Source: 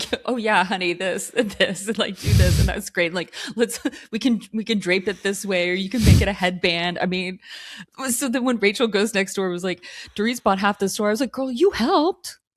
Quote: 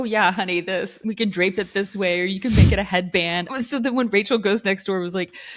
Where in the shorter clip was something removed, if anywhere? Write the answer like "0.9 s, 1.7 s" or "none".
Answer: 1.0 s, 3.4 s